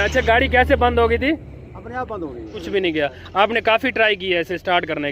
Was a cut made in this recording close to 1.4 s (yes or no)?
no